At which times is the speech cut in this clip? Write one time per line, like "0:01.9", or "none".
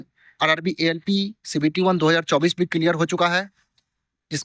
none